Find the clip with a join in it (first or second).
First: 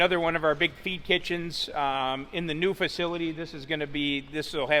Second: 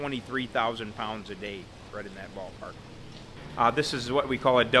second